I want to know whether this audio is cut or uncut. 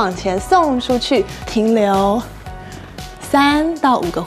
uncut